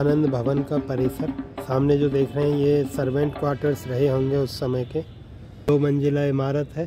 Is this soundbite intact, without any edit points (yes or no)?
no